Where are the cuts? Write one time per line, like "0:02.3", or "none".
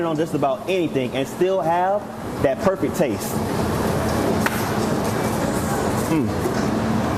none